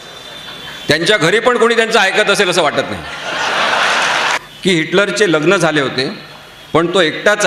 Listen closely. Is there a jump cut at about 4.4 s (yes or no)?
yes